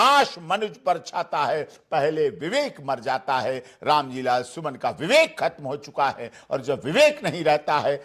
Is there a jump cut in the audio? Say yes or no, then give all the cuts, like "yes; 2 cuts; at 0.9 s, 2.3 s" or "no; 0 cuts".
no; 0 cuts